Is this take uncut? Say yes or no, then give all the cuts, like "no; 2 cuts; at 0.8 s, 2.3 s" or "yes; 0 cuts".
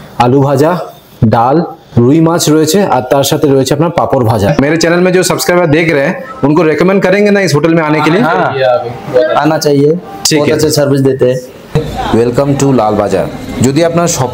no; 3 cuts; at 1.8 s, 4.5 s, 11.8 s